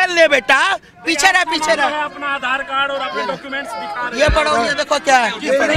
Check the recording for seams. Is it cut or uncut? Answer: uncut